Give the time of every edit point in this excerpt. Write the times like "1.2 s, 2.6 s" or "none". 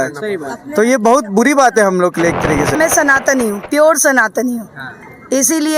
2.7 s